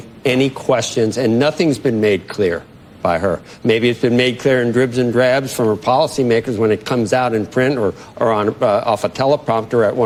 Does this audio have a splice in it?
no; 0 cuts

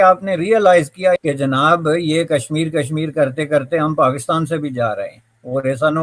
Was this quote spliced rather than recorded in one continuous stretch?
yes; 1 cut; at 1.2 s

